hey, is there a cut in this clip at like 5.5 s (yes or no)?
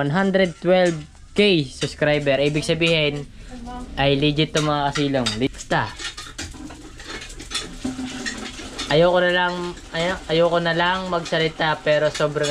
yes